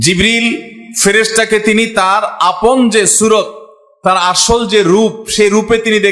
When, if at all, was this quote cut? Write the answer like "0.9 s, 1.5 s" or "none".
none